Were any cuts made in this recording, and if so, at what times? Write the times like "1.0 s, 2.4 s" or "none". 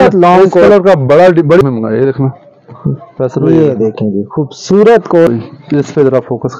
1.6 s, 5.3 s